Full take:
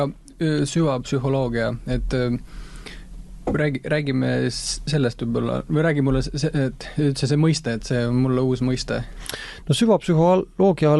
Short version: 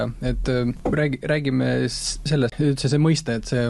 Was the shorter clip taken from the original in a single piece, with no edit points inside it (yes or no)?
no